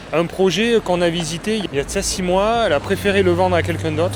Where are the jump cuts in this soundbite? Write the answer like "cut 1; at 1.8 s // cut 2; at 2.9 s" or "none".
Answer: none